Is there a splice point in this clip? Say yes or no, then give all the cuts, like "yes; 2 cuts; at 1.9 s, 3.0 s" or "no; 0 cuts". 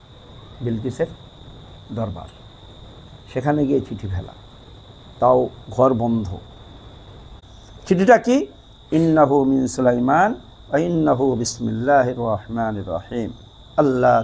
yes; 1 cut; at 7.4 s